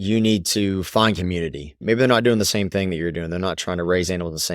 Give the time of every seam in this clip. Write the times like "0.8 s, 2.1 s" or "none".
1.8 s